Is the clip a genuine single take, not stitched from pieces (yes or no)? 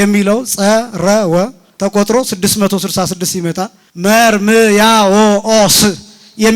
no